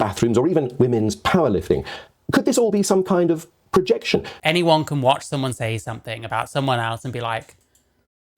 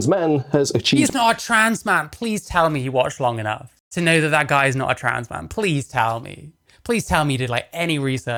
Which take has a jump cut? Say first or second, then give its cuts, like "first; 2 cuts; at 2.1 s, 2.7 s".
first; 1 cut; at 4.3 s